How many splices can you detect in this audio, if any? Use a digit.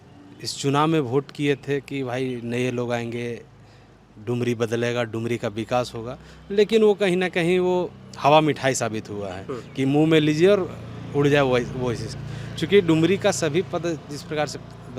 0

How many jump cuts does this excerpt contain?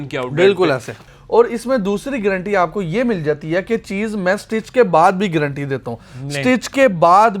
1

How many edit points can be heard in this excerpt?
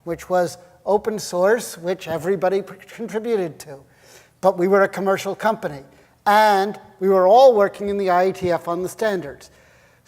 1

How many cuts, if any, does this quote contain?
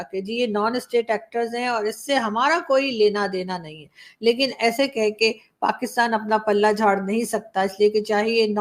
0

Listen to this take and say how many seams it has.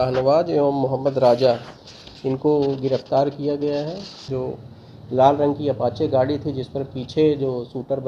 1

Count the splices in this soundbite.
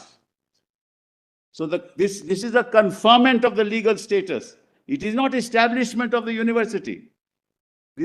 0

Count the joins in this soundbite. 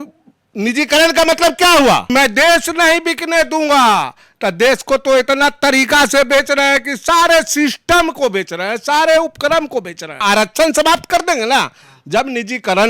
2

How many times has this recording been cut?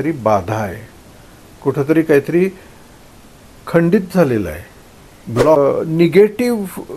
1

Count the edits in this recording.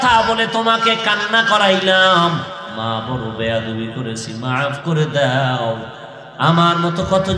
1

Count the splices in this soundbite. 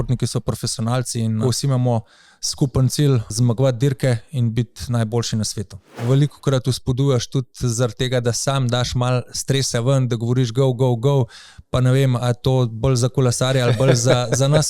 3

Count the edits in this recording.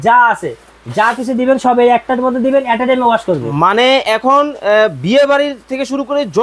0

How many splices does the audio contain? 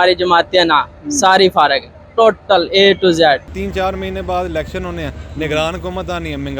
1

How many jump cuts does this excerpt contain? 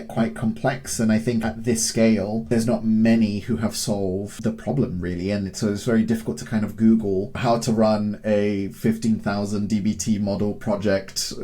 4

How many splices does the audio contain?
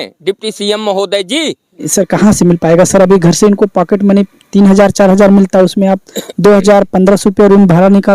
1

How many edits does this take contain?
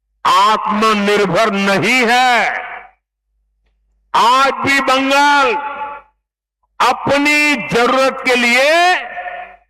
0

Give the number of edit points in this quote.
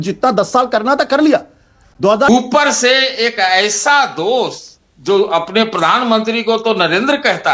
1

